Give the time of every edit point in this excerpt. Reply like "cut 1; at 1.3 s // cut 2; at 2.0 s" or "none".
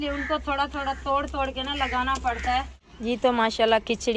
cut 1; at 2.8 s